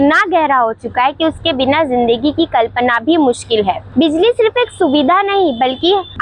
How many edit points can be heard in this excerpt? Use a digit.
0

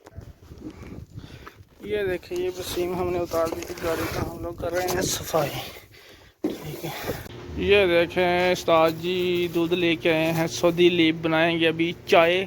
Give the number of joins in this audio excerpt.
1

